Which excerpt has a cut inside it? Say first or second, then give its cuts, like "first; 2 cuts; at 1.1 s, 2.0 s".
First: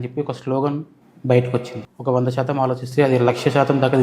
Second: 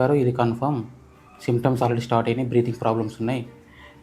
first; 1 cut; at 1.9 s